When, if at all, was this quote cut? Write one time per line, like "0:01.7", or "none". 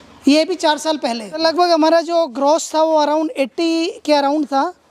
0:01.4